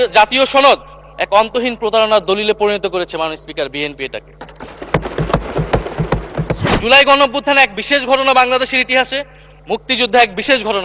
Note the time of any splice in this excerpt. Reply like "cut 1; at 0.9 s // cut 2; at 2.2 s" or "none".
cut 1; at 6.7 s